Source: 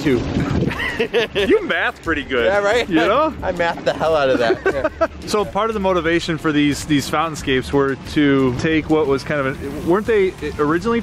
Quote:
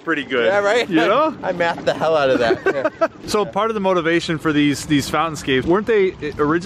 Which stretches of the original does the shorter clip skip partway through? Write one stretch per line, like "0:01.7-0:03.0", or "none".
0:07.6-0:09.8